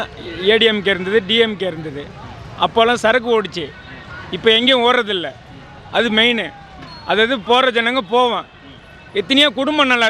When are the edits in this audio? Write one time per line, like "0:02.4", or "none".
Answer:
none